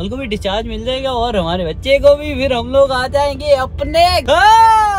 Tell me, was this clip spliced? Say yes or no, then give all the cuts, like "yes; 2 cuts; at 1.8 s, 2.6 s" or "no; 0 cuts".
no; 0 cuts